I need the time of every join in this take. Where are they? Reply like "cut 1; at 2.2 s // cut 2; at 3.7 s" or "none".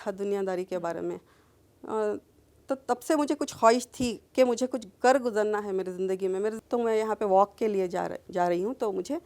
cut 1; at 6.6 s